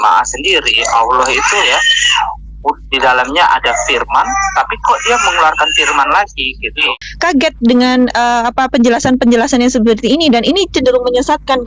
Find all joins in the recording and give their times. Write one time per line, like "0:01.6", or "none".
0:07.0